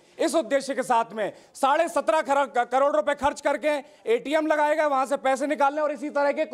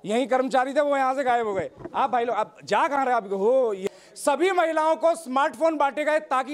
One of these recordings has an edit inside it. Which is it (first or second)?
second